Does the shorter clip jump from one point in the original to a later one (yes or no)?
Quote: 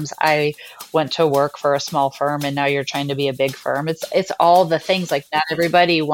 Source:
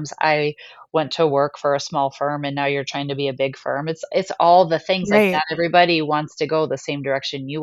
no